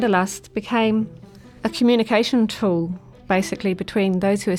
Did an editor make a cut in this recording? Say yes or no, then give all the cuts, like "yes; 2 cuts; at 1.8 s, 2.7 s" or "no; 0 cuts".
no; 0 cuts